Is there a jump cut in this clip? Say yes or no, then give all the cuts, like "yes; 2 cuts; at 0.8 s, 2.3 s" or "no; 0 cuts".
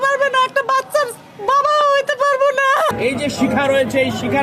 yes; 1 cut; at 2.9 s